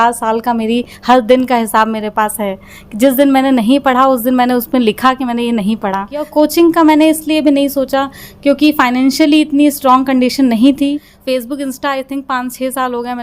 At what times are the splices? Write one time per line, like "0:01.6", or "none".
0:06.3
0:11.1